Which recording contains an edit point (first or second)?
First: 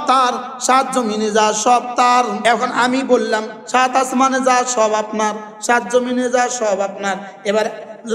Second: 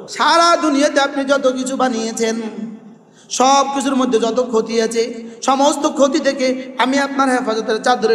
first